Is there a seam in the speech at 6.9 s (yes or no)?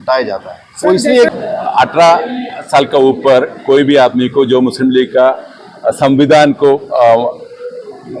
no